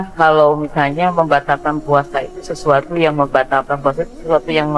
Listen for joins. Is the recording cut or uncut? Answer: uncut